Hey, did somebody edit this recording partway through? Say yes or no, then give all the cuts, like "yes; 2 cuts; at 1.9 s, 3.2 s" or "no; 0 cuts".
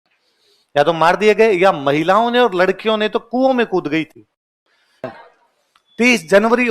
yes; 1 cut; at 5.1 s